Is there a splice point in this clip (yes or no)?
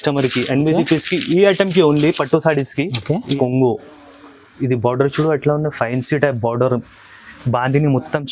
yes